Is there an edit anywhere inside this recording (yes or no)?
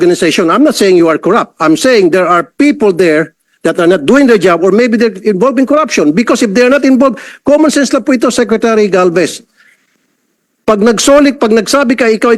no